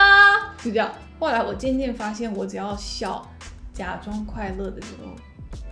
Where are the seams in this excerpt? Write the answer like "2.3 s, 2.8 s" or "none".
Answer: 1.0 s